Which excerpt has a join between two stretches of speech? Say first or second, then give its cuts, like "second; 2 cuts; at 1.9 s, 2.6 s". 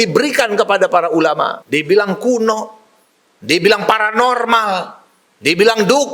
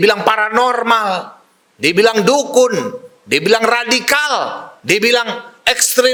first; 1 cut; at 1.6 s